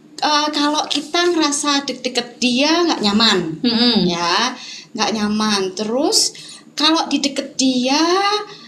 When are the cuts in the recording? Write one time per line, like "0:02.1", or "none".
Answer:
none